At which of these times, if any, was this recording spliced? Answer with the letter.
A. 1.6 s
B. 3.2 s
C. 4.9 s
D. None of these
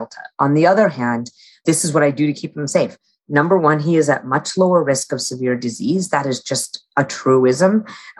A